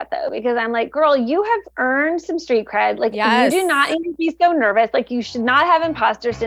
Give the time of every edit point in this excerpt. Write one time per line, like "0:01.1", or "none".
0:01.7
0:05.1